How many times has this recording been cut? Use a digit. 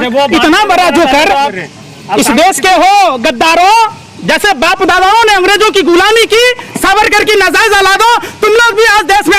1